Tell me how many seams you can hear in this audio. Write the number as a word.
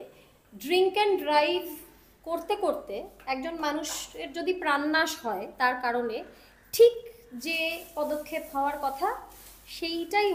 zero